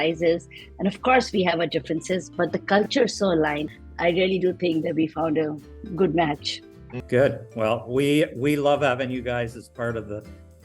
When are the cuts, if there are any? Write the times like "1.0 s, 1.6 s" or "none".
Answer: 3.6 s, 7.0 s